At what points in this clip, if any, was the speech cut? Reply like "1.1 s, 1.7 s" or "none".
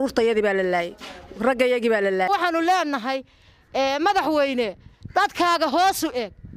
2.3 s